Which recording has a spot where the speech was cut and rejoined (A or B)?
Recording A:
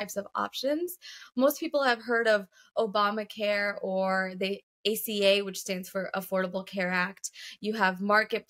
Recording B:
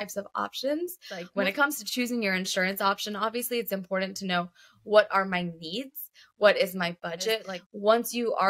B